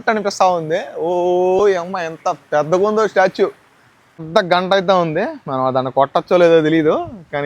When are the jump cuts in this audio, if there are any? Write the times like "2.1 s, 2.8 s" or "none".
4.2 s